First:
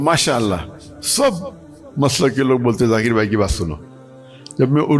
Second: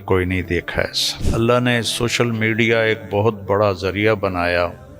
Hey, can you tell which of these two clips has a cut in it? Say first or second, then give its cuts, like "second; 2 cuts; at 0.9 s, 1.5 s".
second; 1 cut; at 1.2 s